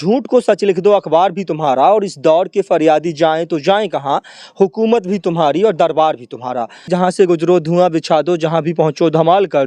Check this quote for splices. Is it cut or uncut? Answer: cut